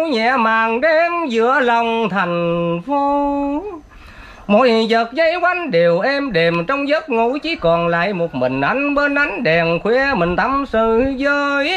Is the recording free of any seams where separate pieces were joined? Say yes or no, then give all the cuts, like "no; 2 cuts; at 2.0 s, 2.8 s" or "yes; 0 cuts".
yes; 0 cuts